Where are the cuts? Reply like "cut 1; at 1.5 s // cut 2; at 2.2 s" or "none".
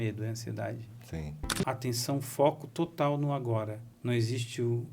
cut 1; at 1.6 s // cut 2; at 3.9 s